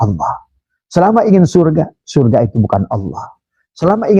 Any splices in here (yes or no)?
no